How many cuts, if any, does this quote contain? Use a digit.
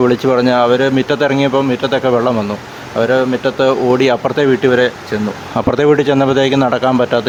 0